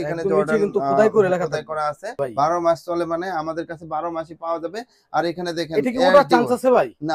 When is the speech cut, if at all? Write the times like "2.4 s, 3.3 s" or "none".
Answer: 2.2 s